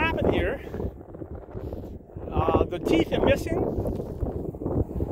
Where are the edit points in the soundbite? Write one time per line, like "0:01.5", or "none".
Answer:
none